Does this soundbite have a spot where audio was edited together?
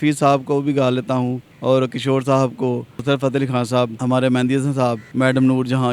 yes; 4 cuts; at 1.5 s, 2.9 s, 4.0 s, 5.0 s

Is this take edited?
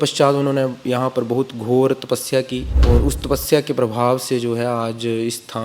yes; 1 cut; at 2.6 s

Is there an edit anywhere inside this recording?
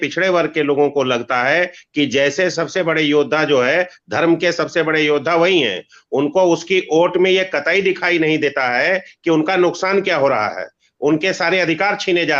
no; 0 cuts

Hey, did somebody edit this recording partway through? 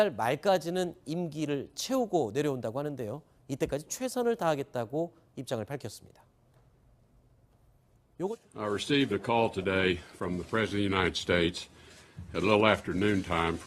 yes; 1 cut; at 8.4 s

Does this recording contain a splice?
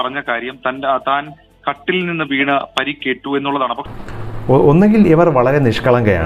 no; 0 cuts

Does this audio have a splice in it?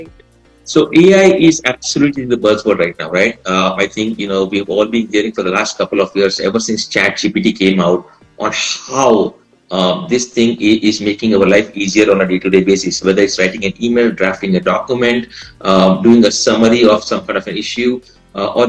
no; 0 cuts

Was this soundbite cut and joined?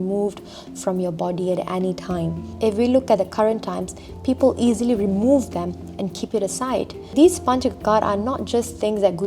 yes; 2 cuts; at 2.4 s, 7.1 s

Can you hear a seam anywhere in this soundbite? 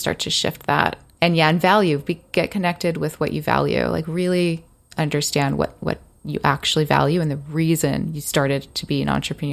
no; 0 cuts

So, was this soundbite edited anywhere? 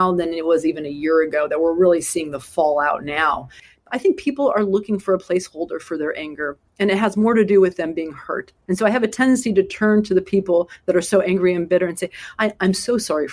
yes; 1 cut; at 3.6 s

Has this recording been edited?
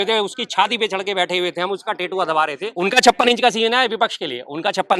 yes; 1 cut; at 2.7 s

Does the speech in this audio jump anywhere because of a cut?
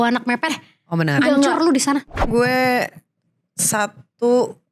yes; 1 cut; at 2.2 s

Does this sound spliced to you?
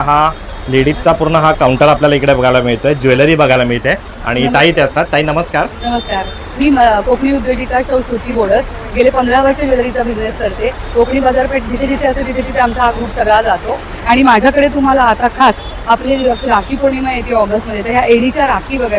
no; 0 cuts

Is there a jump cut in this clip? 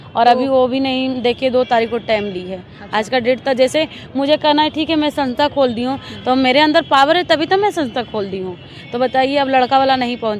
no; 0 cuts

